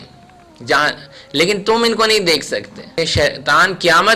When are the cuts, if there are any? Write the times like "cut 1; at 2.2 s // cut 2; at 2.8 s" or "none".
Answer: cut 1; at 2.9 s